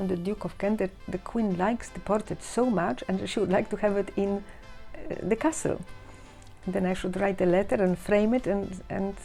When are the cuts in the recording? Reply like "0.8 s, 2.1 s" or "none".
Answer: none